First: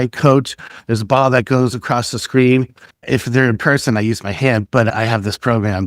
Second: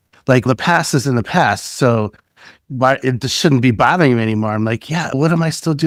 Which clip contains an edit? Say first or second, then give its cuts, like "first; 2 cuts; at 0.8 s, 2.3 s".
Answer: first; 1 cut; at 3.0 s